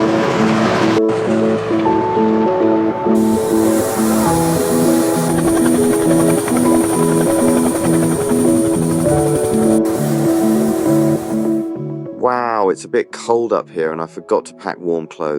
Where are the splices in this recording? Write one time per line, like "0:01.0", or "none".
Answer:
none